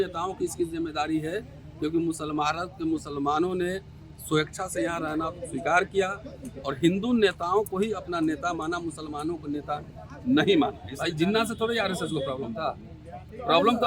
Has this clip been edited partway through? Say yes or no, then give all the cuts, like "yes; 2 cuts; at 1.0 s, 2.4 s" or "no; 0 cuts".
yes; 1 cut; at 10.9 s